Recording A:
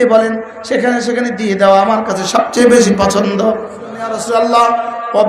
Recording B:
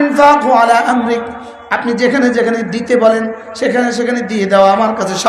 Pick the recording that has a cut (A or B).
A